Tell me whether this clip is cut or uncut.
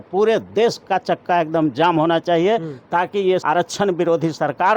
cut